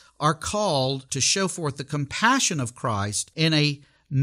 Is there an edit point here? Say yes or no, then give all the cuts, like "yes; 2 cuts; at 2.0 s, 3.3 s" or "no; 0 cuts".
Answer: yes; 2 cuts; at 1.1 s, 3.2 s